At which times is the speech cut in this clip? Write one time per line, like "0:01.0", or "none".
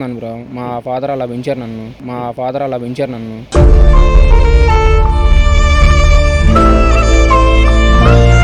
none